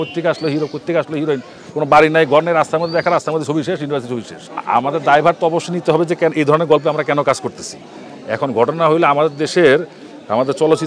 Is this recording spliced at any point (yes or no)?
no